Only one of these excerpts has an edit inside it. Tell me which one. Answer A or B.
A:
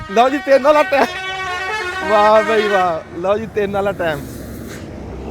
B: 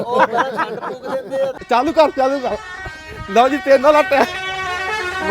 B